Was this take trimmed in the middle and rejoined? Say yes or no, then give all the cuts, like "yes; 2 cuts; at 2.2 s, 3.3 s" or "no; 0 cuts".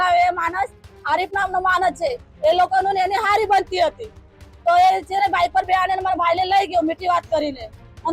no; 0 cuts